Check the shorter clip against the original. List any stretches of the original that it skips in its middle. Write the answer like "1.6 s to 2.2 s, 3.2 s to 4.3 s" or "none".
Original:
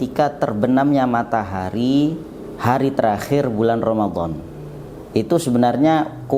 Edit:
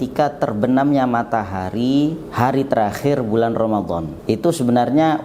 2.2 s to 2.5 s, 4.4 s to 5.0 s